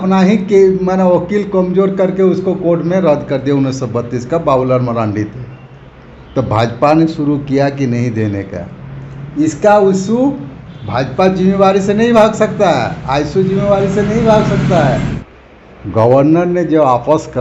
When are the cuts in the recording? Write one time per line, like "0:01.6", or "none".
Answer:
0:15.2